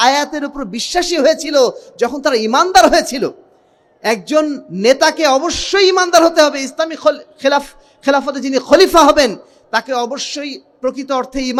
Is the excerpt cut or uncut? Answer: uncut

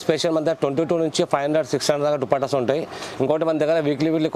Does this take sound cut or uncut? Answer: uncut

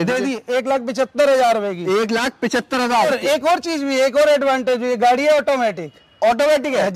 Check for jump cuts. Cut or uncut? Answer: cut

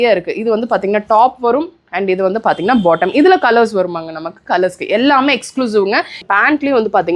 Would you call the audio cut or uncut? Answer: cut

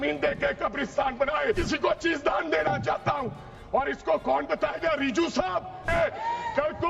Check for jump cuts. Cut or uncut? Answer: cut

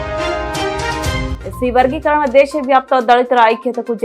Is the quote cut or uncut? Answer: cut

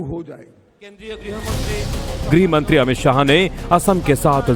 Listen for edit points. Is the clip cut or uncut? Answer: uncut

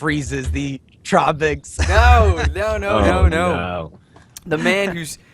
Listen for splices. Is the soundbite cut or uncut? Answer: cut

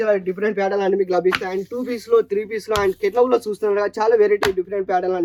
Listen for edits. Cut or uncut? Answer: uncut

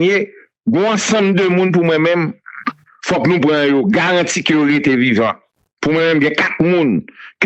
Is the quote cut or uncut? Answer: uncut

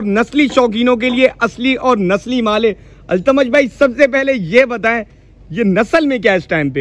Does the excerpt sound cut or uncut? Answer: uncut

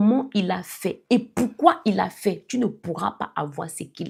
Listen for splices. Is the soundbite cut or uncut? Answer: uncut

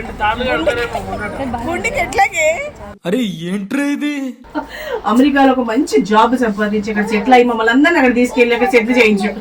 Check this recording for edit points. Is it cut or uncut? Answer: cut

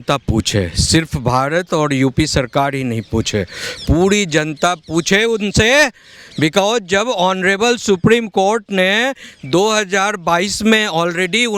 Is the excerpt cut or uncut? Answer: uncut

